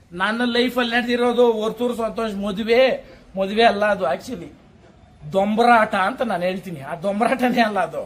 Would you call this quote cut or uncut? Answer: uncut